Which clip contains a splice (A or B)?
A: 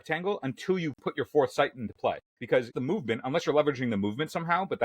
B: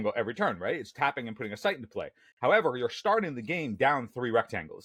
A